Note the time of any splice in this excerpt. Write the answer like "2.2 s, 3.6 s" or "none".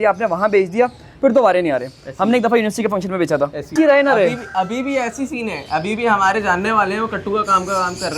3.7 s